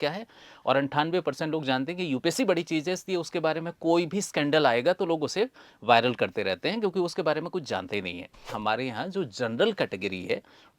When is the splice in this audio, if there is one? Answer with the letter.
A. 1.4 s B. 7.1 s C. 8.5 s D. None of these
C